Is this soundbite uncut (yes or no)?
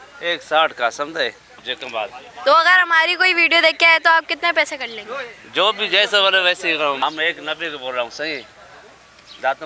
no